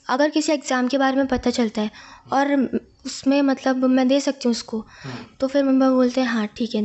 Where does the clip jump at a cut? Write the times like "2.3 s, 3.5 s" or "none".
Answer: none